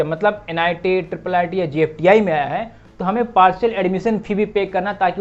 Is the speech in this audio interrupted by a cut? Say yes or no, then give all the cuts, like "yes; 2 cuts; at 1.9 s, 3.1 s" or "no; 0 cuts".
no; 0 cuts